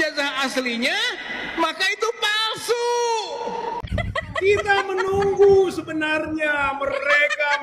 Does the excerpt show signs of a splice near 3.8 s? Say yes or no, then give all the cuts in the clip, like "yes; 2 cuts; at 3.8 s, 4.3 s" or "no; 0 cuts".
yes; 1 cut; at 3.8 s